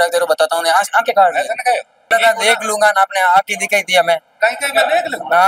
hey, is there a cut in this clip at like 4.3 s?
no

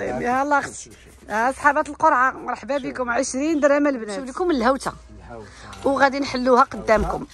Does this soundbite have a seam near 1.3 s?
no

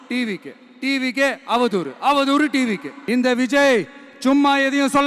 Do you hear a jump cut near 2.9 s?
yes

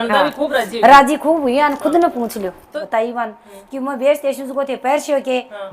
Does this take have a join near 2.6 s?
yes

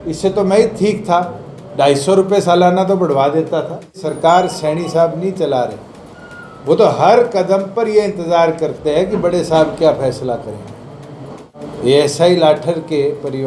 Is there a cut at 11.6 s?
yes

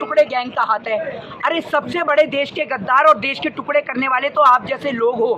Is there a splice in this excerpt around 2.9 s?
no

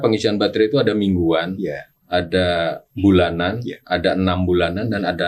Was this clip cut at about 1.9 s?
yes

